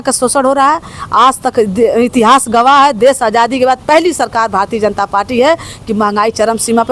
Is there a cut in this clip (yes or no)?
no